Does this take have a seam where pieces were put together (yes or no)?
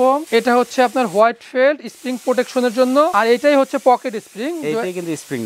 no